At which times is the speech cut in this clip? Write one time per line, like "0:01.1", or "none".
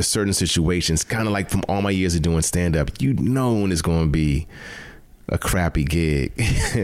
none